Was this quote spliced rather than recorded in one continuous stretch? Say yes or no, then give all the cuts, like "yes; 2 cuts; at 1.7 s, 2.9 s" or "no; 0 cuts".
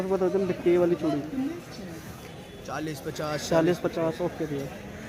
no; 0 cuts